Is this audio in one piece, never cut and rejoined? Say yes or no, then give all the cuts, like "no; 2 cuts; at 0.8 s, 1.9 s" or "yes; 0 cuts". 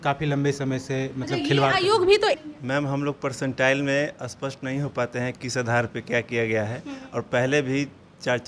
no; 1 cut; at 2.4 s